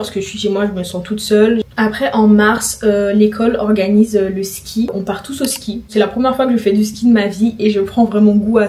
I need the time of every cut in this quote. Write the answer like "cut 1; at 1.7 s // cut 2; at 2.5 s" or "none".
none

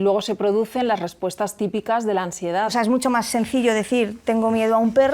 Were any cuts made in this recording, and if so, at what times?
cut 1; at 2.7 s

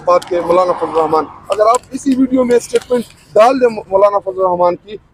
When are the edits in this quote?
none

